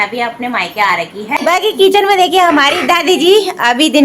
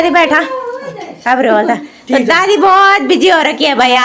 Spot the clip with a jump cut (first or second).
first